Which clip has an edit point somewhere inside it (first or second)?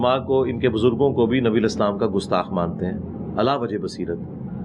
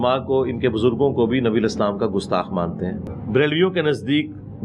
second